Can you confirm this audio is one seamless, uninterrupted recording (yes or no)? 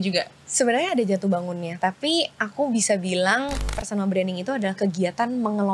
no